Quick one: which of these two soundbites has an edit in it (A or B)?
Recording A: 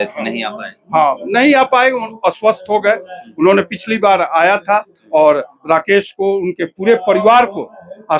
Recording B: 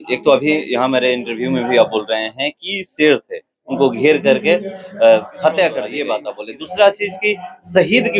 B